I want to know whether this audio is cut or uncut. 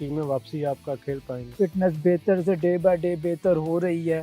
cut